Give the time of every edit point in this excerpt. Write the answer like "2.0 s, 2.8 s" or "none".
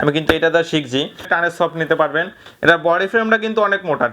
1.3 s